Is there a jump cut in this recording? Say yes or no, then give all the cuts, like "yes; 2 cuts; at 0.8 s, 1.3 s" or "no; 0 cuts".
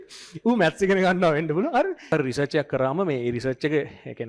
yes; 1 cut; at 2.1 s